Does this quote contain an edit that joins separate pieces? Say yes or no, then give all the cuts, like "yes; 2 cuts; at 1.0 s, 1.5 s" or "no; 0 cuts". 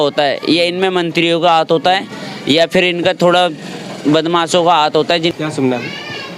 yes; 1 cut; at 5.3 s